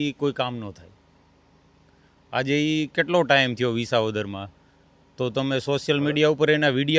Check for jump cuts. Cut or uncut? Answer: uncut